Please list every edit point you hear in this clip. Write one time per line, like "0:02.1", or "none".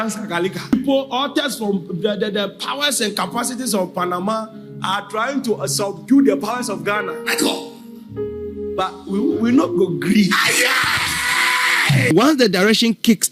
0:00.7
0:12.1